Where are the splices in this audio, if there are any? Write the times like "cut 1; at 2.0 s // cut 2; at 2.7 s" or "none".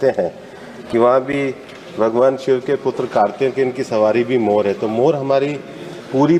none